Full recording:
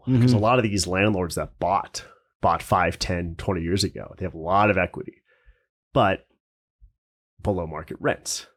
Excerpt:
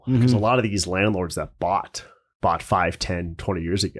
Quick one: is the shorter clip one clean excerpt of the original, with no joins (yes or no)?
yes